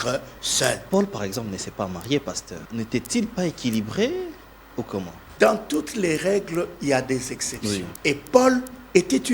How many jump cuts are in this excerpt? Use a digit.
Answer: 4